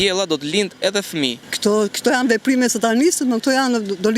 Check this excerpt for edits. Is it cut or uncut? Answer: cut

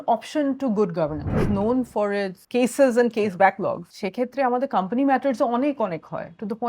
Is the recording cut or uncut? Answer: cut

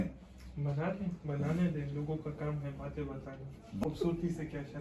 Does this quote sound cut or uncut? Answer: cut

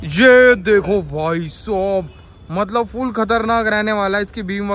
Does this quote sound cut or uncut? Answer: uncut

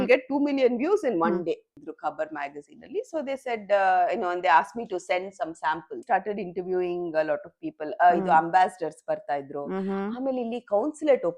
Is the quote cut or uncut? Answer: cut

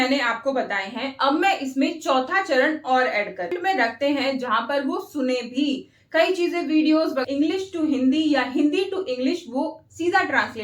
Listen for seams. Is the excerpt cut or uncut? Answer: cut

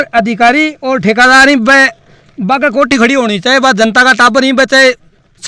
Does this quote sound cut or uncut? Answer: uncut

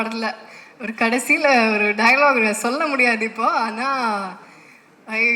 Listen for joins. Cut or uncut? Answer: uncut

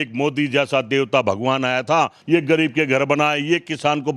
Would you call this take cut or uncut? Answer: cut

